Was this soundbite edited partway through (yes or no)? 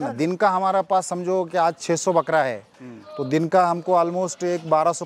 no